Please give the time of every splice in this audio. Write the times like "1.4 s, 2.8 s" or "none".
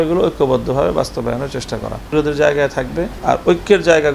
3.1 s